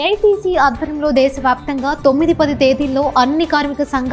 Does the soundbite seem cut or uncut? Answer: uncut